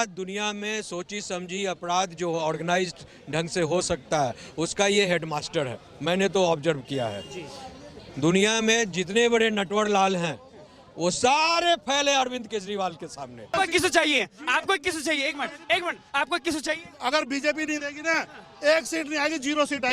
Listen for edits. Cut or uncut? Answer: cut